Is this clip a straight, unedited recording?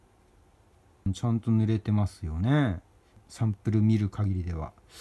no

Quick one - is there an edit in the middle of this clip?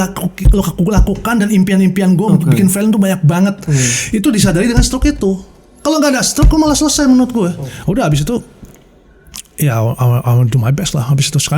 yes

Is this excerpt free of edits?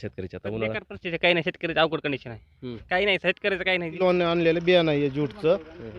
no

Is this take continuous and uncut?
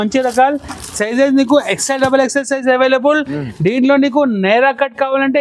yes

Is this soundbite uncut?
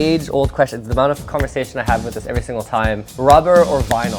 no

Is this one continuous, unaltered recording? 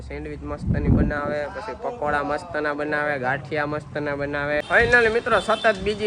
no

